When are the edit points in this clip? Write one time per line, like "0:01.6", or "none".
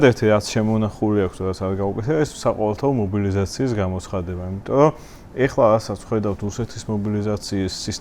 none